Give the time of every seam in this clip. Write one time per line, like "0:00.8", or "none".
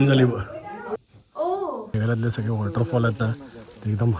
0:02.0